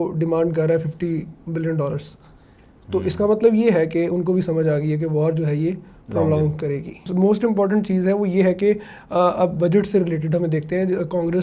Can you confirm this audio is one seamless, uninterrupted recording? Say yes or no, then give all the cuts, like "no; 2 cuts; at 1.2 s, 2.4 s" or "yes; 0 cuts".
yes; 0 cuts